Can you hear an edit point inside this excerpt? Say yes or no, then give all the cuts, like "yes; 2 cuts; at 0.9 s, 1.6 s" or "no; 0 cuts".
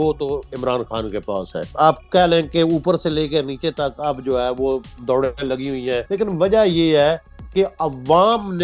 yes; 2 cuts; at 1.7 s, 6.1 s